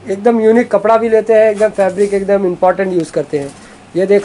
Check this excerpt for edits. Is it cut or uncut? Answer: uncut